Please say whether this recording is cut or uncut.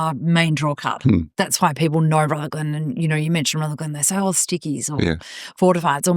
uncut